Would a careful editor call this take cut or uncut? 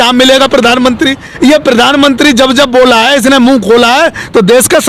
cut